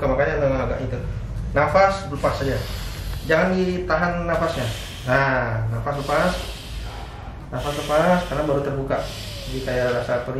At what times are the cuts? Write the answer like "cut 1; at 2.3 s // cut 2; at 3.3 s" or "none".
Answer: none